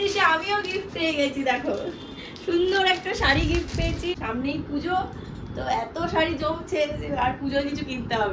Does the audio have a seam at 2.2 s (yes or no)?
no